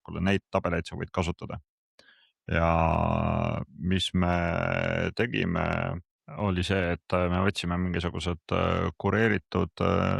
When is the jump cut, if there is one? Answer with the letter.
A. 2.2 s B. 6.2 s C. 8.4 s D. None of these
B